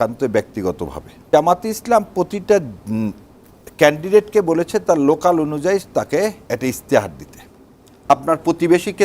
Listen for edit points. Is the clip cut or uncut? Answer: cut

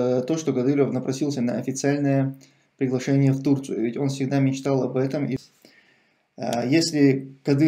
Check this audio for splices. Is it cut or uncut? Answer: cut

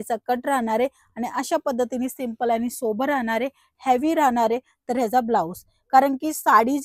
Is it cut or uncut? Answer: uncut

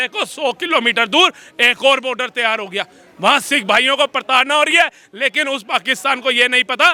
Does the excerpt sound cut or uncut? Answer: uncut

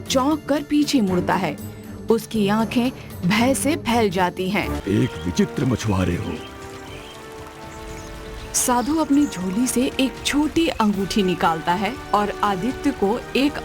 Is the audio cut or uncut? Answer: cut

